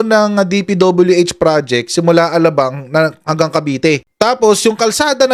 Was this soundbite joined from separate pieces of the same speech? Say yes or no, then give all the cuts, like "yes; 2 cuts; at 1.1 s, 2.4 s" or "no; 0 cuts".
yes; 1 cut; at 4.1 s